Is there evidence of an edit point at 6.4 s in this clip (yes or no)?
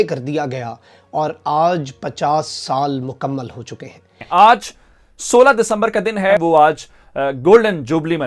yes